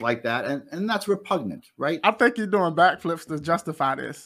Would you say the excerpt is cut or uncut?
cut